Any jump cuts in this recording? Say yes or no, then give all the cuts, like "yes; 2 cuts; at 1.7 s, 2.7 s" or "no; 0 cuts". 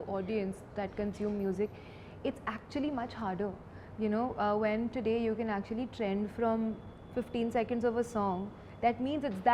no; 0 cuts